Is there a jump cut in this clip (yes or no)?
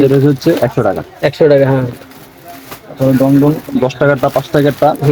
no